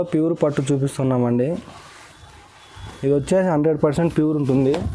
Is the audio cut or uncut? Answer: uncut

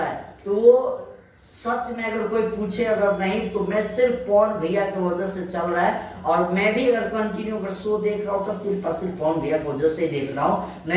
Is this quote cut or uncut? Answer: uncut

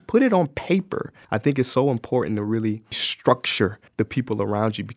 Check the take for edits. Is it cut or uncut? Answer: cut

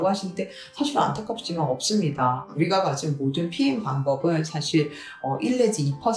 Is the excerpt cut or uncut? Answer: cut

